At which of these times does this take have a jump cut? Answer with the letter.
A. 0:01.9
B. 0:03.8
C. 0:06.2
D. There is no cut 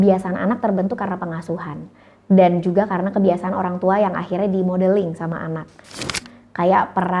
C